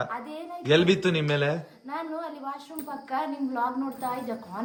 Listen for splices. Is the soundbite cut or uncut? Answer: uncut